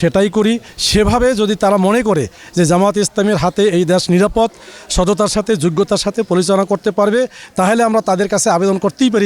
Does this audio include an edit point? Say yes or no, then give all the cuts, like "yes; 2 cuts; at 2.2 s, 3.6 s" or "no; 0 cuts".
no; 0 cuts